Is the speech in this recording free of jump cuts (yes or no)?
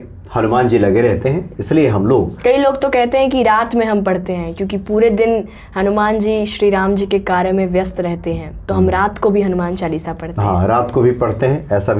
yes